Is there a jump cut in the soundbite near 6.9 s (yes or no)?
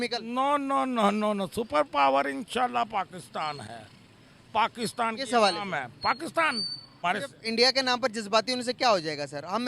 yes